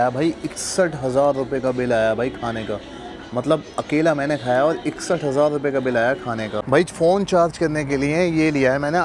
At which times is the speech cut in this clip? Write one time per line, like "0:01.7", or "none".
0:06.6